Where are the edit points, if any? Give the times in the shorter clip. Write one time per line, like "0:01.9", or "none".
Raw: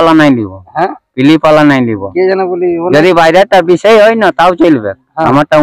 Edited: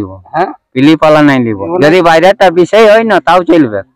0:01.7